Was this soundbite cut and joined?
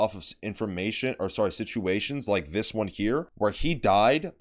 yes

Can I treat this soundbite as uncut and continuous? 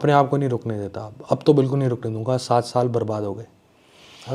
yes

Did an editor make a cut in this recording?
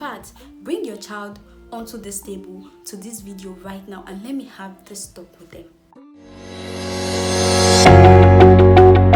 no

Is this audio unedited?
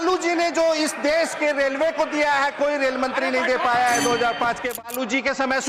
no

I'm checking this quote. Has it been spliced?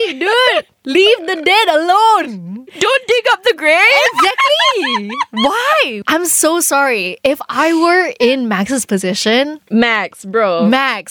yes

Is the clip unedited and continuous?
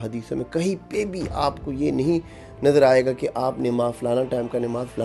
yes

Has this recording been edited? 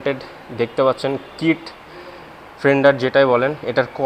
no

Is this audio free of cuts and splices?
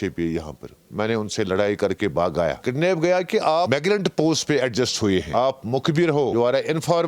no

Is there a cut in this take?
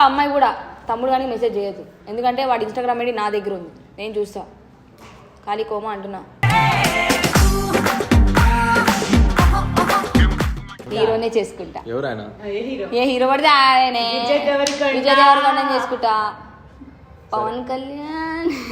yes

